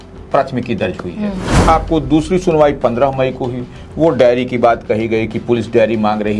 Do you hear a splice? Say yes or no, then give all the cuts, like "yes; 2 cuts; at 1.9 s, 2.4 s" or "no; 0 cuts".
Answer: yes; 1 cut; at 1.6 s